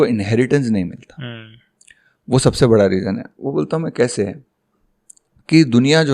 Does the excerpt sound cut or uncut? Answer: uncut